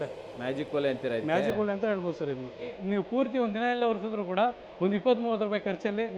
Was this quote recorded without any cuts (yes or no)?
no